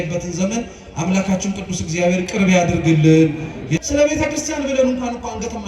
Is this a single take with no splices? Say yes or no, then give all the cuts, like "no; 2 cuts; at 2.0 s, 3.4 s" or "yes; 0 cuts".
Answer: no; 1 cut; at 3.7 s